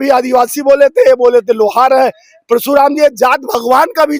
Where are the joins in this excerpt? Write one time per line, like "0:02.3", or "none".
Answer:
none